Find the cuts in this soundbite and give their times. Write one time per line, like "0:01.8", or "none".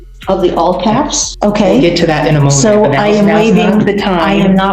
0:01.3